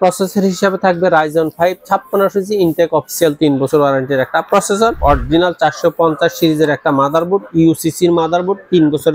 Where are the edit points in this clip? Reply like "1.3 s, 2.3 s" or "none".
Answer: 5.0 s